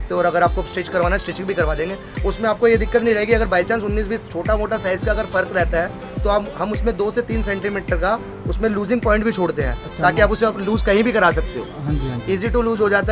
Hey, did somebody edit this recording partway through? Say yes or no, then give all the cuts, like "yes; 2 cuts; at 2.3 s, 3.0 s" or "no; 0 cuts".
no; 0 cuts